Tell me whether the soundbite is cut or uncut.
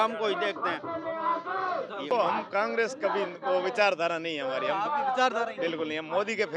cut